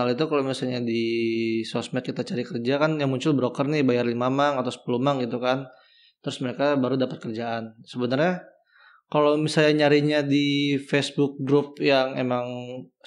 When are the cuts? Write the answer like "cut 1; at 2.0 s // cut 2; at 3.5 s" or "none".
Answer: none